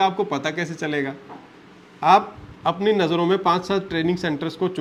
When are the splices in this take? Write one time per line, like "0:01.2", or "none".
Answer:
none